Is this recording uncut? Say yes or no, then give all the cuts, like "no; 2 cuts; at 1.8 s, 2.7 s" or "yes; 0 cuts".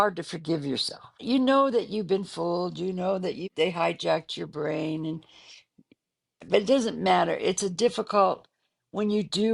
no; 2 cuts; at 1.2 s, 3.4 s